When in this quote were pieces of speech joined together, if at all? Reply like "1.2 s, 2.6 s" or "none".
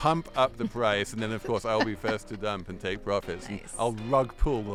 none